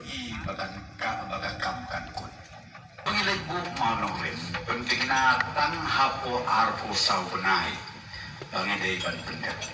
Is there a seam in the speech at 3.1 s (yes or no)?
yes